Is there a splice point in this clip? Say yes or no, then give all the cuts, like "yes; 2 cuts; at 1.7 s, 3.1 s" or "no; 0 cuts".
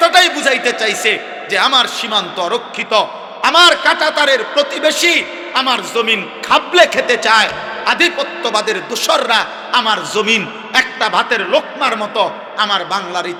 no; 0 cuts